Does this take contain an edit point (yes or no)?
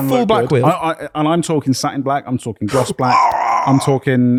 no